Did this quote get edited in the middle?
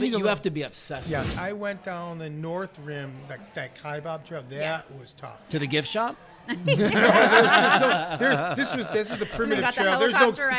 yes; 1 cut; at 1.3 s

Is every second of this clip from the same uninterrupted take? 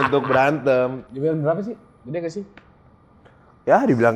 no; 1 cut; at 1.0 s

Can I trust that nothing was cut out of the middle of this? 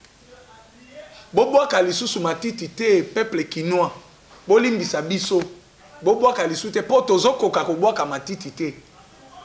yes; 0 cuts

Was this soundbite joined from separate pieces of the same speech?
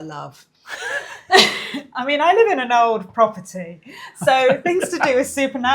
no; 0 cuts

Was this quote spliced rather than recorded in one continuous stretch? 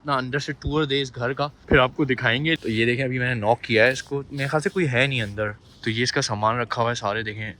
yes; 3 cuts; at 1.6 s, 2.6 s, 5.7 s

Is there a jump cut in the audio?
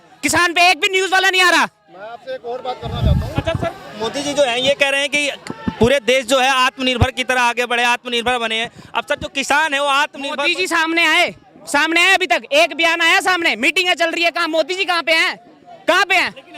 no; 0 cuts

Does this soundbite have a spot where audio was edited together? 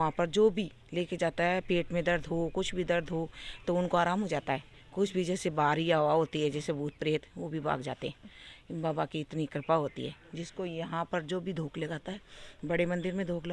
no; 0 cuts

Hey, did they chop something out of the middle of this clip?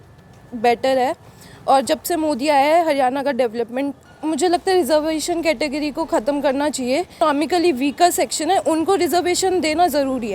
yes; 2 cuts; at 4.0 s, 7.2 s

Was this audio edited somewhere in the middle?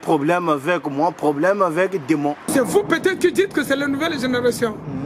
yes; 1 cut; at 2.5 s

